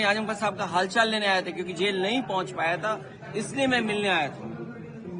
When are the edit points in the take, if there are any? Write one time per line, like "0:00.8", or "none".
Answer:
none